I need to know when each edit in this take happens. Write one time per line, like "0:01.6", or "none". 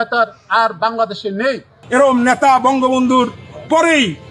0:01.7